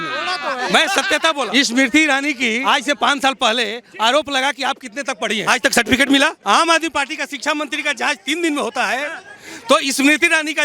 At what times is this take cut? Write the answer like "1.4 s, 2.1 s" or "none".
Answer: 1.5 s, 2.6 s, 5.4 s, 6.4 s